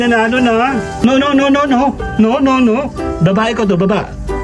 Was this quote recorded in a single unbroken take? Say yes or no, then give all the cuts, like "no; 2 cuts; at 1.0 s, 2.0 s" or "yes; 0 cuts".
no; 1 cut; at 1.0 s